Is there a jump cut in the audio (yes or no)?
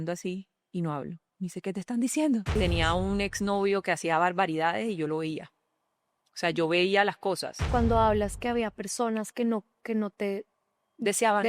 yes